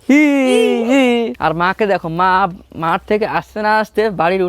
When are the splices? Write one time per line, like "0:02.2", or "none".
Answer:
0:01.3